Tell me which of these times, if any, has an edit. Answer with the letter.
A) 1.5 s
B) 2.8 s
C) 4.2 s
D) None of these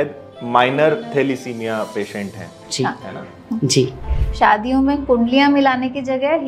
C